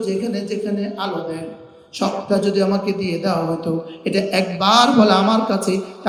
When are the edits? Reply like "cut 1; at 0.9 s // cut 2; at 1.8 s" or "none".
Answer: none